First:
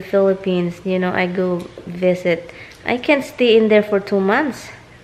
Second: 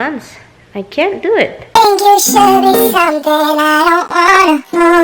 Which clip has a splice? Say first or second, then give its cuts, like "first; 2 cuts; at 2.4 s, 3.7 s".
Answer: second; 1 cut; at 1.7 s